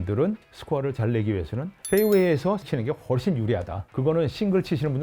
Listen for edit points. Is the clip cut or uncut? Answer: cut